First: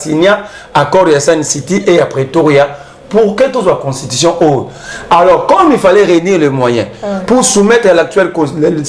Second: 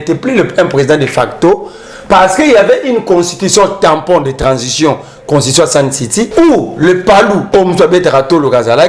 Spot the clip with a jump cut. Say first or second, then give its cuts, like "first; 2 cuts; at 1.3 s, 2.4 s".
second; 2 cuts; at 6.3 s, 7.4 s